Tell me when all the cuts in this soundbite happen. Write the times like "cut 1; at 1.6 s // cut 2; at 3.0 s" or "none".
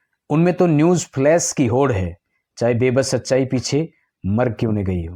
none